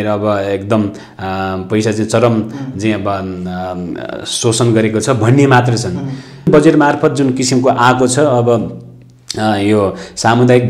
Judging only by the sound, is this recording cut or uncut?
cut